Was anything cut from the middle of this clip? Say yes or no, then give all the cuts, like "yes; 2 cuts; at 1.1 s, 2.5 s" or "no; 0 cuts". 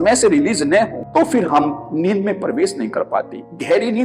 yes; 1 cut; at 1.0 s